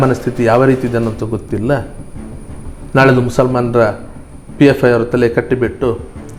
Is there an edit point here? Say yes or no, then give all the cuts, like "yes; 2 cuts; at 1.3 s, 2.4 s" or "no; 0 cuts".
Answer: no; 0 cuts